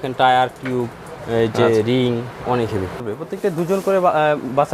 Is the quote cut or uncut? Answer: cut